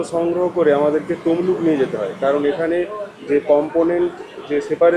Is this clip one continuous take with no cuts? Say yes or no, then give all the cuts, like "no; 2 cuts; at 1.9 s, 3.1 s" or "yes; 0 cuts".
yes; 0 cuts